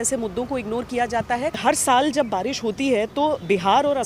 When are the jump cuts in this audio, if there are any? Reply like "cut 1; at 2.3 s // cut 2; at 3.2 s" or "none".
cut 1; at 1.6 s